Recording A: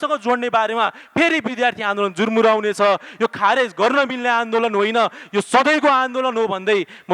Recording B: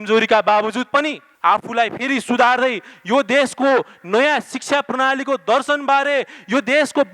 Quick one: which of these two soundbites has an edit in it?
B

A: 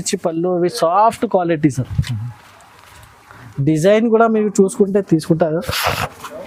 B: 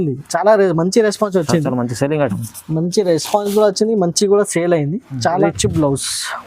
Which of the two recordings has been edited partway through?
B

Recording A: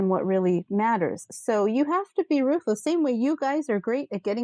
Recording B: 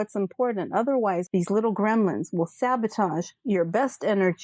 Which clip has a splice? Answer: B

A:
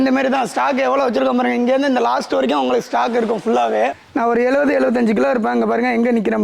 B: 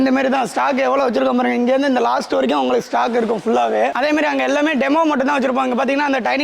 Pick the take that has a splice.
A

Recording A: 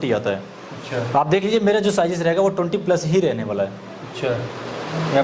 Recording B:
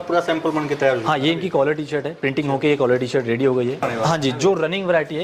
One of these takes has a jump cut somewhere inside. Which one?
B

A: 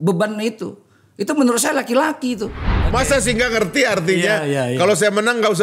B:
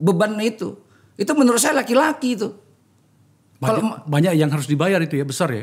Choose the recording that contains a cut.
A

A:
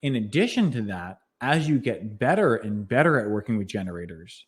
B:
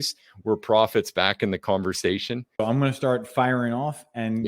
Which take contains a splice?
B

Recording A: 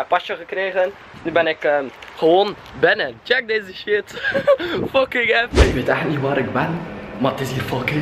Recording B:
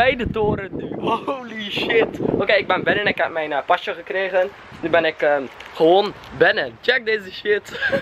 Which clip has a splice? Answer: A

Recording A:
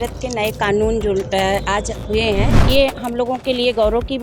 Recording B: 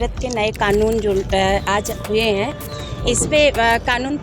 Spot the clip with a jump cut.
A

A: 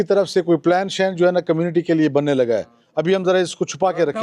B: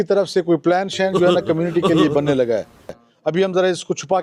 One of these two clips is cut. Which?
A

